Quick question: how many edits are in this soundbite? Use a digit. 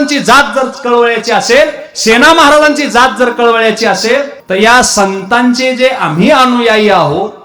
1